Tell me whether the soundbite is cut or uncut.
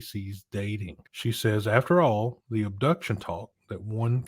cut